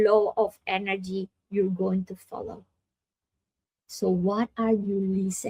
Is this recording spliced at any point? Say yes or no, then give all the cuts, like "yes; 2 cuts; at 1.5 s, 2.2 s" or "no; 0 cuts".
no; 0 cuts